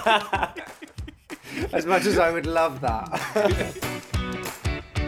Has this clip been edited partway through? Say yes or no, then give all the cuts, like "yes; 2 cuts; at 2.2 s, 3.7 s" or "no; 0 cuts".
yes; 1 cut; at 3.7 s